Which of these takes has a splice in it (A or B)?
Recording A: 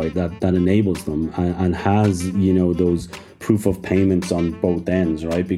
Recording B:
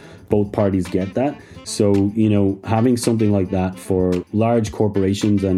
B